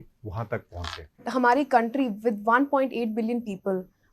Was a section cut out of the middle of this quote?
yes; 1 cut; at 1.3 s

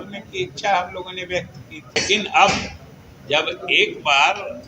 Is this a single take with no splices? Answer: no; 1 cut; at 2.0 s

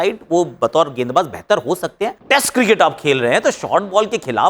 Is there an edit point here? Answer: yes; 1 cut; at 2.2 s

